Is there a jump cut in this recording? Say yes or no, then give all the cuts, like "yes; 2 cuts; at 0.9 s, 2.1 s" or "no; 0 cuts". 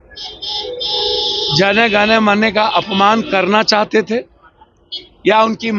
no; 0 cuts